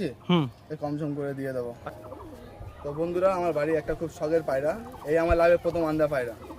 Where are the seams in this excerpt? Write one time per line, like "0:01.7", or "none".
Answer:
0:01.8